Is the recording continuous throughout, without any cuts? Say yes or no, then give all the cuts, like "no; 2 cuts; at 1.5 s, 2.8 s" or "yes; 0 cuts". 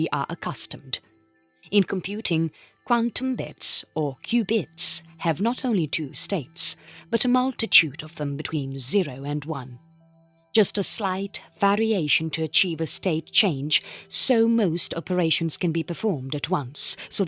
no; 1 cut; at 7.8 s